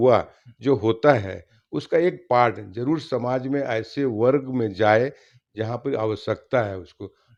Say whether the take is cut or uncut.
uncut